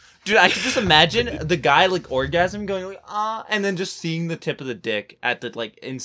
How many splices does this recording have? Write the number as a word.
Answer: zero